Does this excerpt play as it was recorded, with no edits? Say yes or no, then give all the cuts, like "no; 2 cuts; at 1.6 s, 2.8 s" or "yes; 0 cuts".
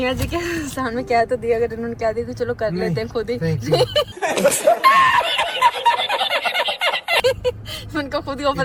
yes; 0 cuts